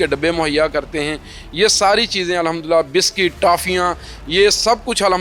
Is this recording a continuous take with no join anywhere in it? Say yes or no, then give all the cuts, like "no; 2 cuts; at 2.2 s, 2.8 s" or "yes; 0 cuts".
yes; 0 cuts